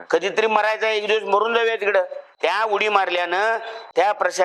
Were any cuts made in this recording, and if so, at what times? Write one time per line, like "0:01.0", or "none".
0:02.3